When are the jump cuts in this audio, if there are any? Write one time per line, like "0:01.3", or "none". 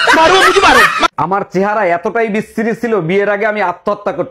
0:01.0